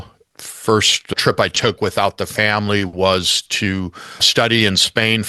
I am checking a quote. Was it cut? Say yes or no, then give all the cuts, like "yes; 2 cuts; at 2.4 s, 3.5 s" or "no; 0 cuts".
no; 0 cuts